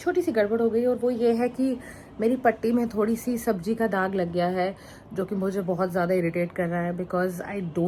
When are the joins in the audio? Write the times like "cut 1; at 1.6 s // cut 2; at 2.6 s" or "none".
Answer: none